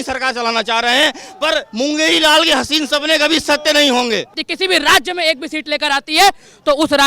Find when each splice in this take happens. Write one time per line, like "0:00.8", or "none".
0:04.4